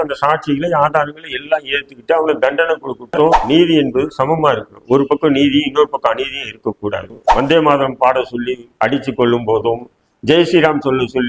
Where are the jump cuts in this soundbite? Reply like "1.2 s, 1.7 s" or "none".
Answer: 3.4 s, 7.2 s